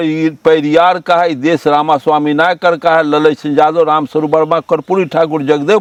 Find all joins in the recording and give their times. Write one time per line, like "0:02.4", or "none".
none